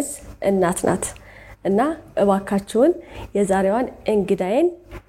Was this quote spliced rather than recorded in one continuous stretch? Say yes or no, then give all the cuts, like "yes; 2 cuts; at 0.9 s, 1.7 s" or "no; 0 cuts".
no; 0 cuts